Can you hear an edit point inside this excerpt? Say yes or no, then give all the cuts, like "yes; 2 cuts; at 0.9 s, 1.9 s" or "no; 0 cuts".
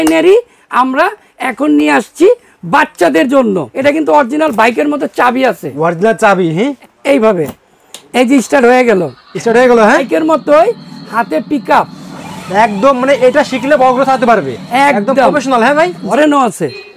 yes; 4 cuts; at 3.7 s, 6.8 s, 10.1 s, 16.0 s